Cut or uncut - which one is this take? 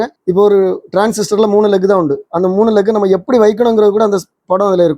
uncut